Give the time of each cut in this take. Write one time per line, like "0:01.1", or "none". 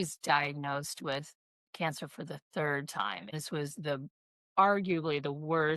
0:03.3